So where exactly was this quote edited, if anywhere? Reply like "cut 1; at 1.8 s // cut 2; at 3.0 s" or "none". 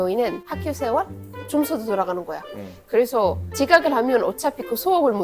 none